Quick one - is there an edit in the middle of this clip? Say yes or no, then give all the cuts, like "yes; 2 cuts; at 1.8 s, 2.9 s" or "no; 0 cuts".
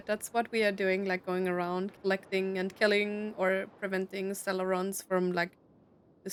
no; 0 cuts